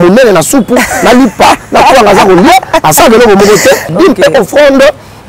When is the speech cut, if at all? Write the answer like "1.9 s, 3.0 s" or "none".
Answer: 3.9 s

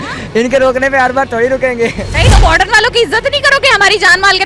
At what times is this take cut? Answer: 2.1 s

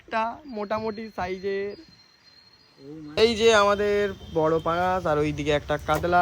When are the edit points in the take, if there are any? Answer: 3.1 s

